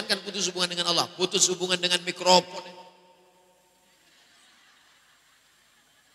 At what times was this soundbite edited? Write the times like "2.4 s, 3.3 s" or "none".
none